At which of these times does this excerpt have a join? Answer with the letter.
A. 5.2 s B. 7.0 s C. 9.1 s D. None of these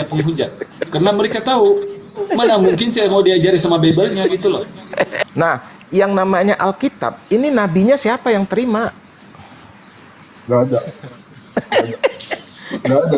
A